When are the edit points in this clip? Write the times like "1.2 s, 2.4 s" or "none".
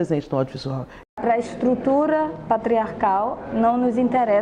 1.1 s